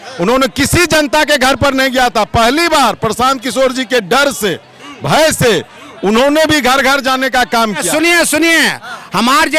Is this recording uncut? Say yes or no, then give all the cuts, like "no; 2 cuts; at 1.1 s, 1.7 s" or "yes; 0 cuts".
no; 1 cut; at 7.8 s